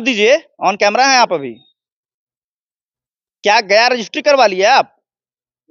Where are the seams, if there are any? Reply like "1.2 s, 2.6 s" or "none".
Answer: none